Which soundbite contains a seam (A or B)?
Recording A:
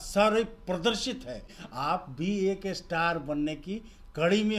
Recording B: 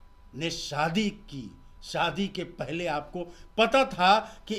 A